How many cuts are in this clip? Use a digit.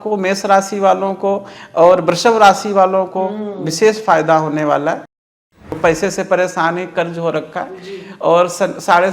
1